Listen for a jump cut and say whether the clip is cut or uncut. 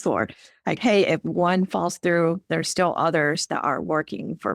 uncut